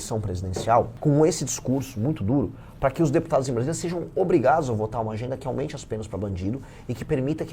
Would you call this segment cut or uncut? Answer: cut